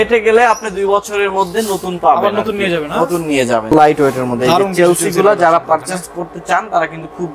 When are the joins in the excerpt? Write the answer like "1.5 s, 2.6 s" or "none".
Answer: 3.7 s